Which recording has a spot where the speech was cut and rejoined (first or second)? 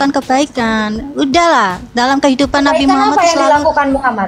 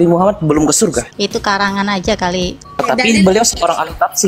second